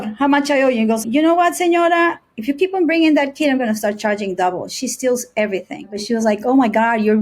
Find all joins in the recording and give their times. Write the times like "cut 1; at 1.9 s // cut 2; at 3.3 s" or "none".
cut 1; at 1.0 s // cut 2; at 5.9 s